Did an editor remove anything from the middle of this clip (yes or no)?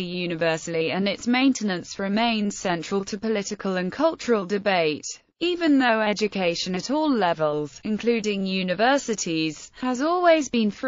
no